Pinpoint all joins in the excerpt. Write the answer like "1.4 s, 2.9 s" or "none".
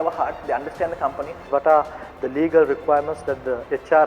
1.4 s